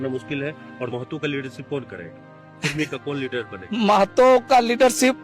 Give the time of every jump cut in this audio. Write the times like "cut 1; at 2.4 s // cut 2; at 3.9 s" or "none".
cut 1; at 0.9 s

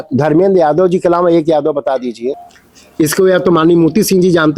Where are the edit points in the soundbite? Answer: cut 1; at 2.5 s

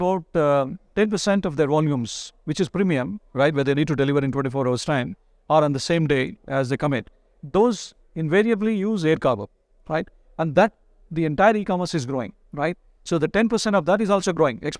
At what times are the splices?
none

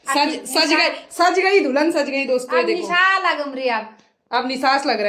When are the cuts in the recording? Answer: none

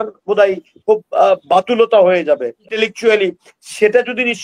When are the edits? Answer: cut 1; at 2.7 s

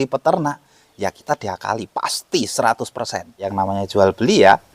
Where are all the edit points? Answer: cut 1; at 3.5 s

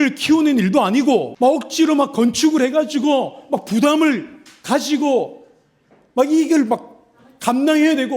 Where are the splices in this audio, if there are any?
cut 1; at 1.3 s

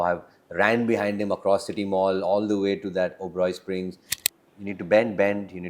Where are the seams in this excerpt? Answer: cut 1; at 4.0 s

